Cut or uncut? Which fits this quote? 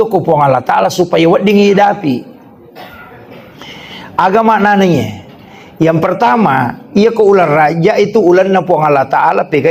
uncut